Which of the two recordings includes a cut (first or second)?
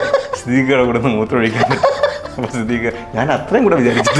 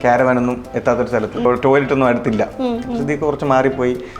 second